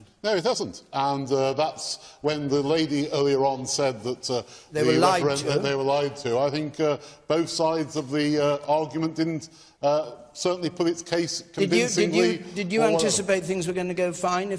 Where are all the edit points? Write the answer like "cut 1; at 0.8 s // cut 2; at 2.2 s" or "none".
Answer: none